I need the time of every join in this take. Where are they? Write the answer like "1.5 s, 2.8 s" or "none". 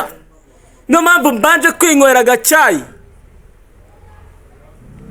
none